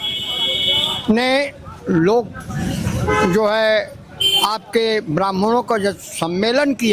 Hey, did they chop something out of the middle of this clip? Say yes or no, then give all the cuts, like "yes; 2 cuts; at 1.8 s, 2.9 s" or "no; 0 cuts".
no; 0 cuts